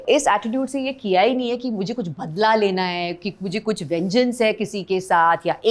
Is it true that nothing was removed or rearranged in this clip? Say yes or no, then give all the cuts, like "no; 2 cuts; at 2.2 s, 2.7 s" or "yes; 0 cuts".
yes; 0 cuts